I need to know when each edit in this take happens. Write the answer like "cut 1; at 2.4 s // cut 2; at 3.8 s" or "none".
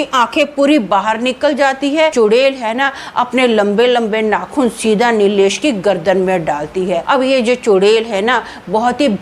cut 1; at 2.1 s // cut 2; at 7.0 s